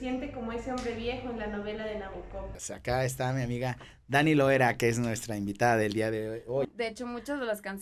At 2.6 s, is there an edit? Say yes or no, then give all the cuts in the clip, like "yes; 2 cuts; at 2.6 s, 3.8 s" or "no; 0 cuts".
yes; 2 cuts; at 2.6 s, 6.7 s